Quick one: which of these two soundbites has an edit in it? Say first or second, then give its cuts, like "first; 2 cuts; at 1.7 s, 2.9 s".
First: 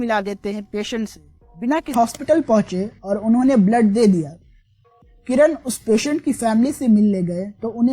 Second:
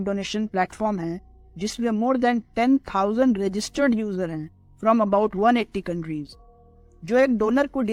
first; 1 cut; at 1.9 s